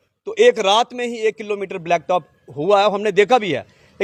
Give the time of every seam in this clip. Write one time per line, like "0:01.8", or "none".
none